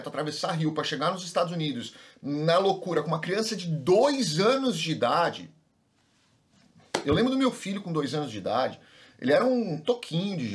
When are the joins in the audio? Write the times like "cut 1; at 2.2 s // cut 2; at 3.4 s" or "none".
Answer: none